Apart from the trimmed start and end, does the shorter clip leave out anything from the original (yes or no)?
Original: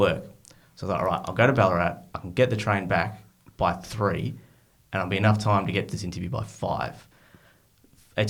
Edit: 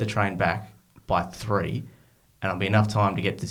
no